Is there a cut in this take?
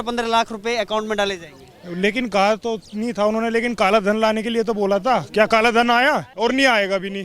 yes; 1 cut; at 6.3 s

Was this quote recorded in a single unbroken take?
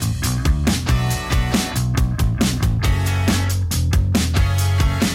no; 1 cut; at 1.9 s

